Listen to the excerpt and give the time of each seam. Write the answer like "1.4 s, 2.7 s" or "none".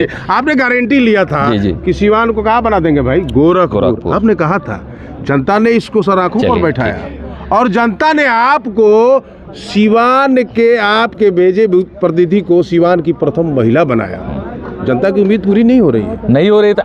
none